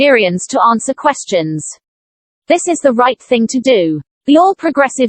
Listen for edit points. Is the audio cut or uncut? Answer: cut